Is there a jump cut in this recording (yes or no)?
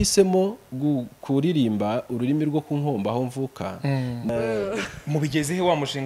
yes